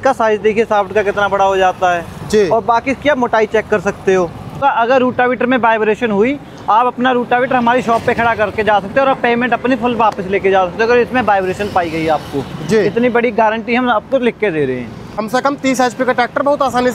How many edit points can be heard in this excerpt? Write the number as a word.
two